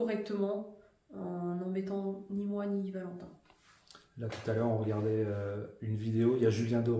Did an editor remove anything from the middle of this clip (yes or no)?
no